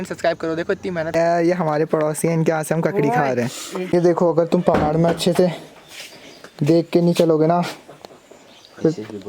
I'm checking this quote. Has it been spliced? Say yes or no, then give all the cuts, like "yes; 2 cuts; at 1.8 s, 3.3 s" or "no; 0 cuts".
yes; 2 cuts; at 1.1 s, 3.7 s